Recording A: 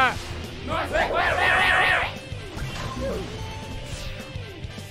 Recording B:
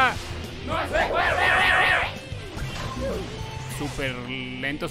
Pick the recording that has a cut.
B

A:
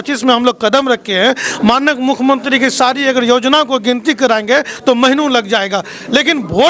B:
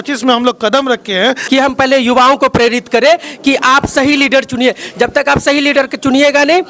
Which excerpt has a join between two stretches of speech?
B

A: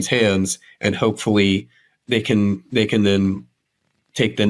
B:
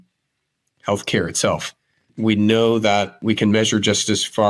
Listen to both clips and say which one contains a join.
B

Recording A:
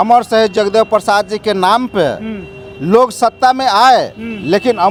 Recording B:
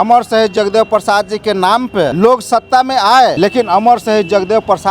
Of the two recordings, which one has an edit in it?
B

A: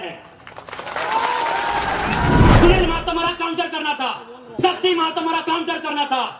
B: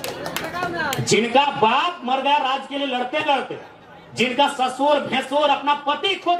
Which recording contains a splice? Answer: A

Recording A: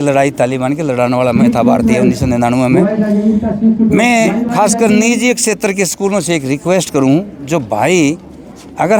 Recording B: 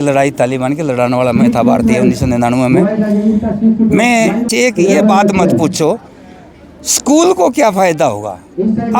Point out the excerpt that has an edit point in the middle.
B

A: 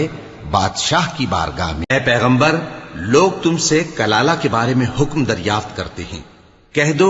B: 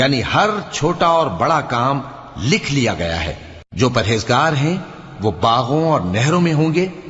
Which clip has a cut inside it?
A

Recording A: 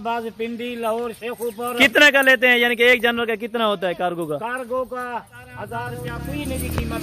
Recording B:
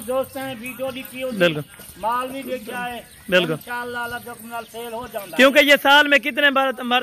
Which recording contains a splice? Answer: A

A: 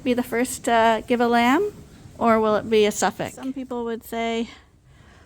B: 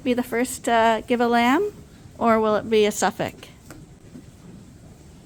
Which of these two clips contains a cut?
A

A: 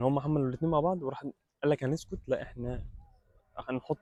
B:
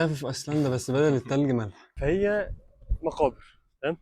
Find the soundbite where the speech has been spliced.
B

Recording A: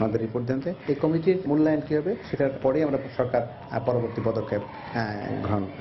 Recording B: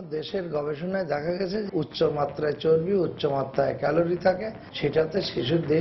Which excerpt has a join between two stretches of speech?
B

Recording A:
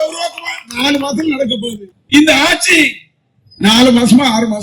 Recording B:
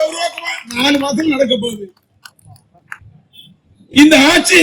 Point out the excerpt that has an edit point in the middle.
A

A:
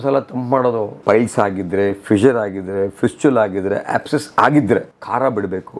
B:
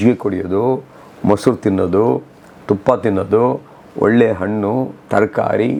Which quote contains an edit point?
A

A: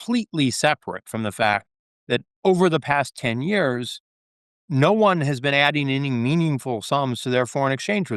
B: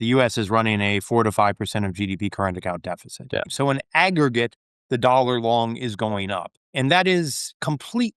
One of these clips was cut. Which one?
B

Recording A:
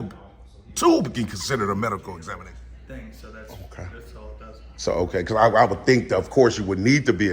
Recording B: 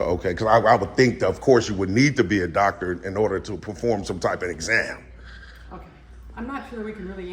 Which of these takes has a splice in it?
A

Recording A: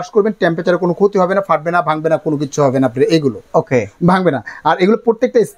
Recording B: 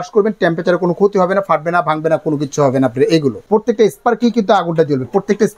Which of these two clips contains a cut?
B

